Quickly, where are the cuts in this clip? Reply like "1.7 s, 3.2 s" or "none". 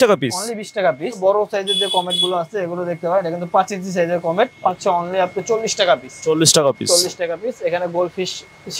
1.2 s, 4.7 s